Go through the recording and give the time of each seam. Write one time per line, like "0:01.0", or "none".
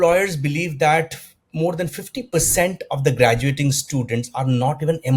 none